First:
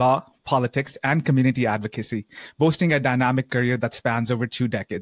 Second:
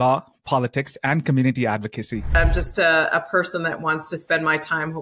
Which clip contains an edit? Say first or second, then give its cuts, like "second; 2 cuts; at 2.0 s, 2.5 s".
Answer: second; 1 cut; at 2.3 s